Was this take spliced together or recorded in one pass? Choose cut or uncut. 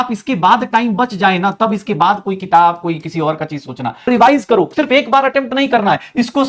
cut